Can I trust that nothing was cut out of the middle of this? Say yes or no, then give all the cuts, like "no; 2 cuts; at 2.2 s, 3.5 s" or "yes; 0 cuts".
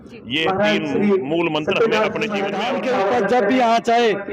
no; 1 cut; at 2.6 s